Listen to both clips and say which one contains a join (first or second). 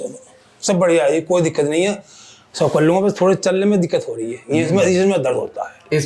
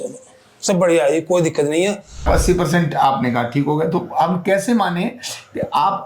second